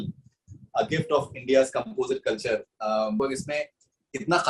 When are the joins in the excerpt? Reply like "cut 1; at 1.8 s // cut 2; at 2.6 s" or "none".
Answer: cut 1; at 3.2 s